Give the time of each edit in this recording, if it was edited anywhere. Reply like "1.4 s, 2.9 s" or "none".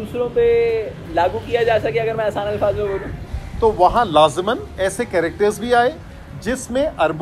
3.2 s